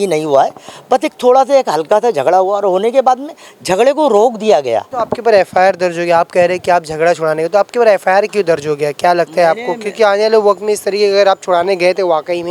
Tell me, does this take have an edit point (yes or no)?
yes